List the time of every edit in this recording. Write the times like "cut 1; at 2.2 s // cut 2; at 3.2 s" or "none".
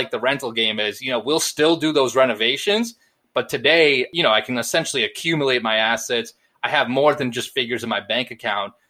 none